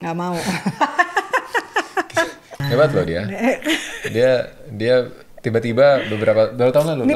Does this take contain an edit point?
yes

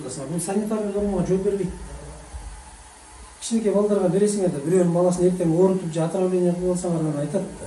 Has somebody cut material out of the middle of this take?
no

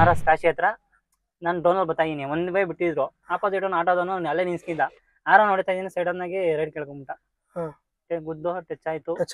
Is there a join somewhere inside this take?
no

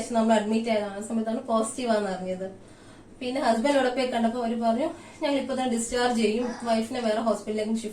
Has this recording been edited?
no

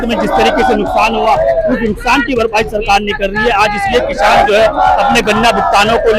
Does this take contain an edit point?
no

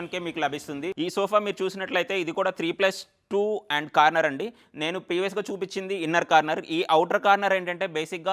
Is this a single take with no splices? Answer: no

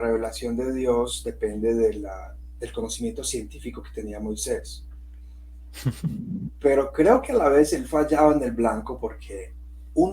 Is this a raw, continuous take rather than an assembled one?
yes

